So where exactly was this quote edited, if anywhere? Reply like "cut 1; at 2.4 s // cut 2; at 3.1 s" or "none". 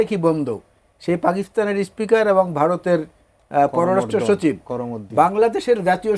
none